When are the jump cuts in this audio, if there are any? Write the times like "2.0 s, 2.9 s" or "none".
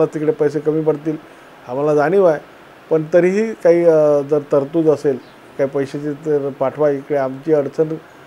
none